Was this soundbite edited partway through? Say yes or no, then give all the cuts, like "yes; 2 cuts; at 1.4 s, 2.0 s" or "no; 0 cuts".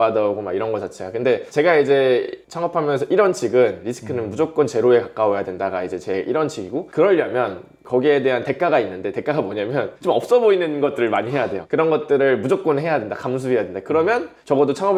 no; 0 cuts